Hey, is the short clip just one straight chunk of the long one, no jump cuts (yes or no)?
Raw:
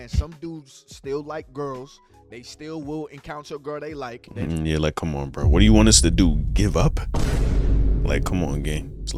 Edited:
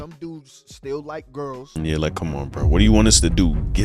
no